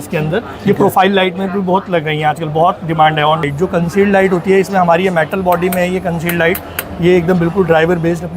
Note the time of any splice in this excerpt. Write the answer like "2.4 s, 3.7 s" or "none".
3.5 s